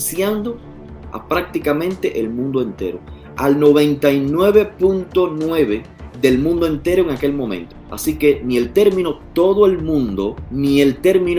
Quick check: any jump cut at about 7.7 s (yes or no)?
yes